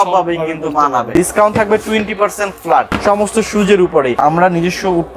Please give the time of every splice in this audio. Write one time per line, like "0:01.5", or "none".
0:01.1
0:02.9
0:04.1